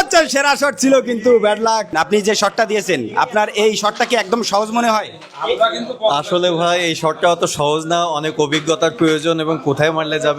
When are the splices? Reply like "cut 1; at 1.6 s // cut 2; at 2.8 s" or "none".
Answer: cut 1; at 1.9 s